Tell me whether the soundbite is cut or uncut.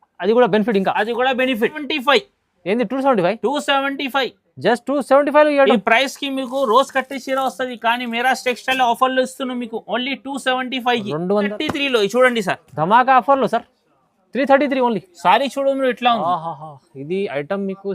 cut